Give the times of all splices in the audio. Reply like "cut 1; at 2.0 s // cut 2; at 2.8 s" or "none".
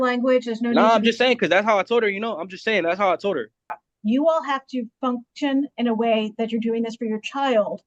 cut 1; at 3.8 s